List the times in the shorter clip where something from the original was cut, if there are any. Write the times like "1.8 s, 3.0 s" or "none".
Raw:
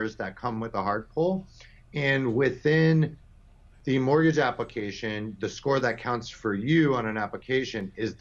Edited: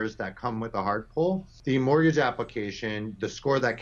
1.5 s